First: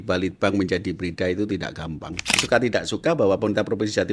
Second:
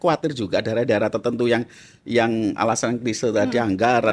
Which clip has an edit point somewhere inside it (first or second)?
first